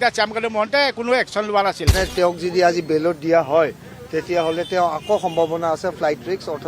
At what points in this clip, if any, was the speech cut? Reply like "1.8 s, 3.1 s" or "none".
1.9 s